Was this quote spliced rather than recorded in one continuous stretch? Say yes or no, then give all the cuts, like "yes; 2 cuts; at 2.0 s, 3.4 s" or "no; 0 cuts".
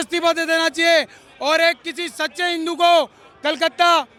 no; 0 cuts